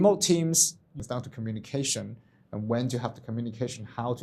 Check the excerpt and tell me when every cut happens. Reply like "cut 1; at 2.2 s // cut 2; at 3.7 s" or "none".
cut 1; at 0.9 s